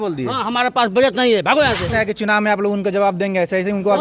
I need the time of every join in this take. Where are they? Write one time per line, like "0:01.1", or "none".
0:01.9